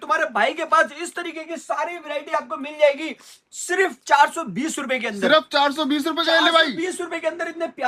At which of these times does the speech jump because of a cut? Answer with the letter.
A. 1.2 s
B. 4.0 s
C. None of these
C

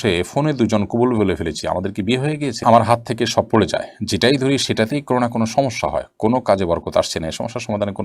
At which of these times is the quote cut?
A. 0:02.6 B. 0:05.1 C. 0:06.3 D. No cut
A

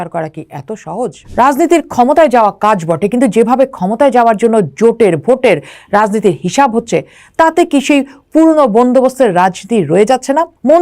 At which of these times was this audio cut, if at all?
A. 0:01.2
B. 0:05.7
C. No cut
A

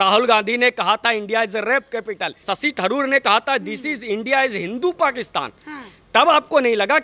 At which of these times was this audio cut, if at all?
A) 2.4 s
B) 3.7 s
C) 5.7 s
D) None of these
A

